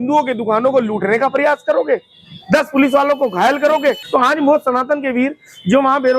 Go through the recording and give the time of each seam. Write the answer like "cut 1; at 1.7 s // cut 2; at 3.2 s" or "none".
cut 1; at 4.0 s

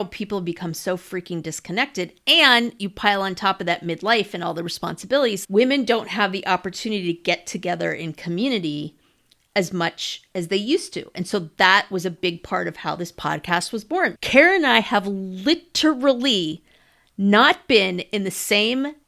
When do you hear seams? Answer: cut 1; at 5.4 s // cut 2; at 14.2 s

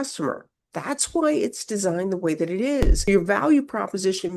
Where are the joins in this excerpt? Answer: cut 1; at 3.0 s

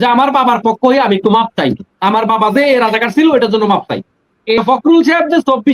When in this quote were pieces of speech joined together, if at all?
cut 1; at 4.6 s

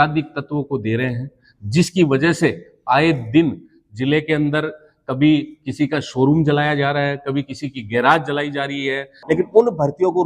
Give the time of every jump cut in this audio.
cut 1; at 9.1 s

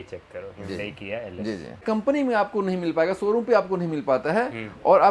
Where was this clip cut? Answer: cut 1; at 1.8 s

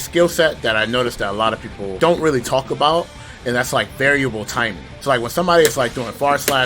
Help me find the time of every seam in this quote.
cut 1; at 1.9 s // cut 2; at 4.9 s

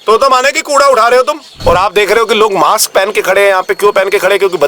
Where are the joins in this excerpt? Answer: cut 1; at 1.4 s

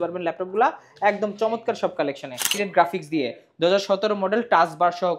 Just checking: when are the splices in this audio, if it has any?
cut 1; at 2.5 s

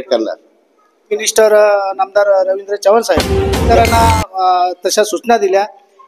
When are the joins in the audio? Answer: cut 1; at 1.2 s // cut 2; at 3.7 s

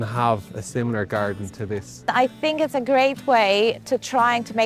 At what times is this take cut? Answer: cut 1; at 2.1 s

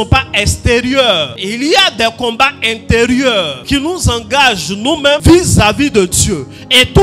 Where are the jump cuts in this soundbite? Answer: cut 1; at 1.4 s // cut 2; at 3.6 s // cut 3; at 5.2 s

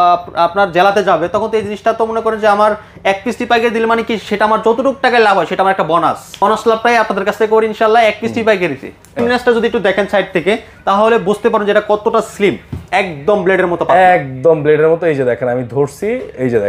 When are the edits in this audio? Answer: cut 1; at 6.4 s // cut 2; at 9.2 s

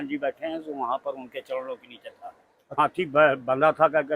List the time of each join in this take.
cut 1; at 2.8 s

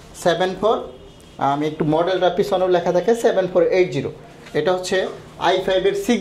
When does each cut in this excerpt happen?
none

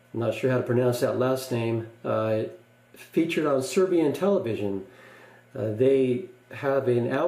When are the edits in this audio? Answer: cut 1; at 3.6 s

